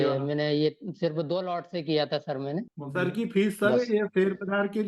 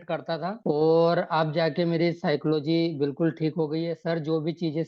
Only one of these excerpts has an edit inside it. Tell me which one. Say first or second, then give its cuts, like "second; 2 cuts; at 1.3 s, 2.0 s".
first; 1 cut; at 2.8 s